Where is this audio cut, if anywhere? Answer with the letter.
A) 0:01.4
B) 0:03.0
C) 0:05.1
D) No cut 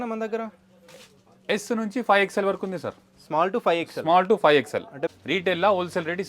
C